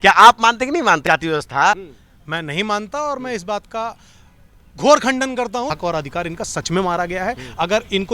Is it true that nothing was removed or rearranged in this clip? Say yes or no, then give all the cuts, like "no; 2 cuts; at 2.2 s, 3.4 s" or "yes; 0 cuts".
no; 3 cuts; at 1.0 s, 1.9 s, 5.7 s